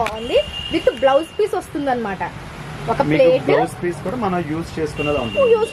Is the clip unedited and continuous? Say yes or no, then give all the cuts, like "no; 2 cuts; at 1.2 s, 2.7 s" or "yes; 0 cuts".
yes; 0 cuts